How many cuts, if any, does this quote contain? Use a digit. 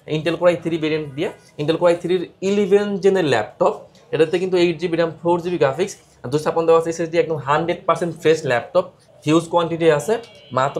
0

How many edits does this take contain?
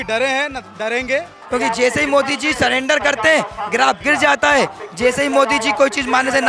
1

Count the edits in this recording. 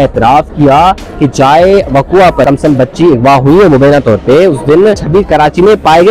2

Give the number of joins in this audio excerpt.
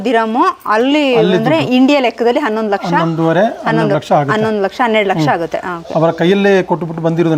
0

